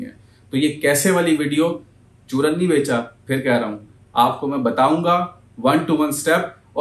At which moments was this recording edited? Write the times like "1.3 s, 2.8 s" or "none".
none